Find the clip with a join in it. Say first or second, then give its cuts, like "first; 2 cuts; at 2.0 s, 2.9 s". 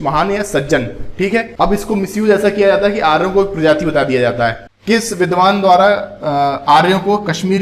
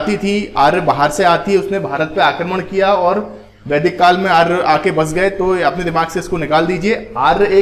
first; 2 cuts; at 1.5 s, 4.7 s